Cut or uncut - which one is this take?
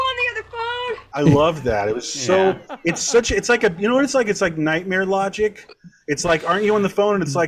cut